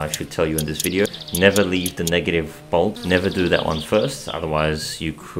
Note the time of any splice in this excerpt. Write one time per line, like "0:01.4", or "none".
0:01.1
0:03.0

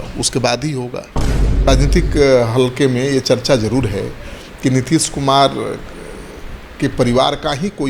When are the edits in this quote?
0:01.5

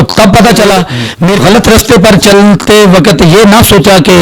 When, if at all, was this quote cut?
0:01.4

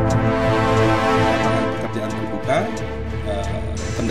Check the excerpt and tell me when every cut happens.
none

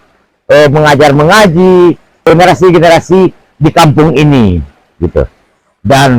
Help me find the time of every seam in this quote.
0:02.2

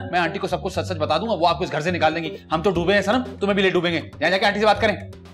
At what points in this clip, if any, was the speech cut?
none

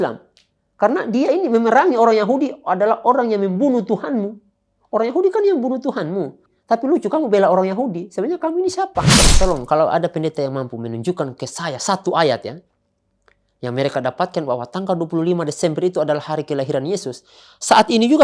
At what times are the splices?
0:06.5
0:09.2

